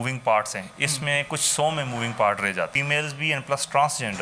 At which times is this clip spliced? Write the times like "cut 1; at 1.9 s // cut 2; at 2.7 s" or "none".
cut 1; at 2.8 s